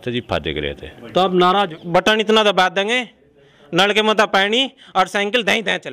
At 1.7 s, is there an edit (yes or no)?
yes